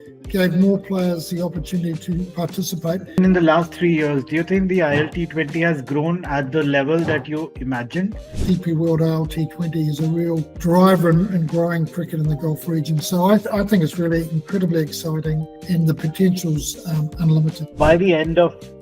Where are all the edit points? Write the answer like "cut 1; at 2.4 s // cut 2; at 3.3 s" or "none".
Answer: cut 1; at 3.1 s // cut 2; at 8.3 s // cut 3; at 17.6 s